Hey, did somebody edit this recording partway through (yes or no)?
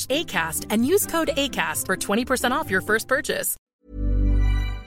yes